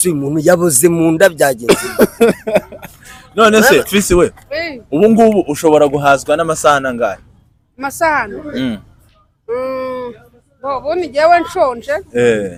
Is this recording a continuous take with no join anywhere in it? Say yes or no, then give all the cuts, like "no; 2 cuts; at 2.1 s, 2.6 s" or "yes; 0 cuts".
yes; 0 cuts